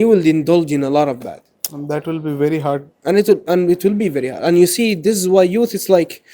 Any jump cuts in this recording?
no; 0 cuts

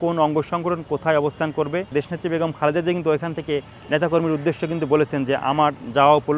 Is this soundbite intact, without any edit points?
no; 1 cut; at 1.9 s

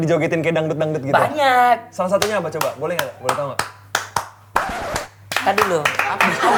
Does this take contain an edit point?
no; 0 cuts

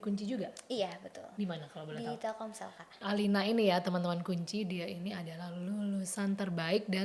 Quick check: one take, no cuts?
no; 2 cuts; at 1.2 s, 3.0 s

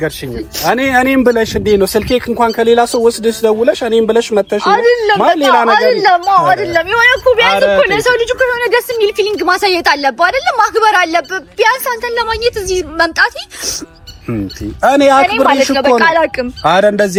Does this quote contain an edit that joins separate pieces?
no; 0 cuts

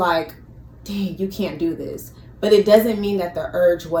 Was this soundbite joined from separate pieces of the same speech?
no; 0 cuts

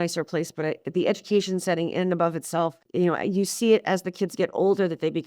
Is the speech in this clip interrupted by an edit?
yes; 1 cut; at 2.8 s

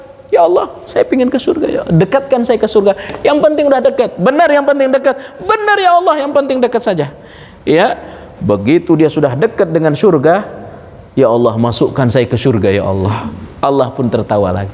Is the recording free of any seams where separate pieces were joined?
yes; 0 cuts

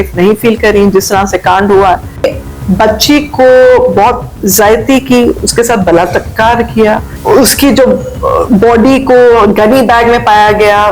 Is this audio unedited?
no; 2 cuts; at 2.2 s, 7.1 s

